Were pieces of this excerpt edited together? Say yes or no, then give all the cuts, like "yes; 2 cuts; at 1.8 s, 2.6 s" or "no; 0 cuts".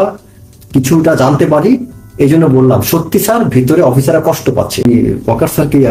yes; 1 cut; at 4.8 s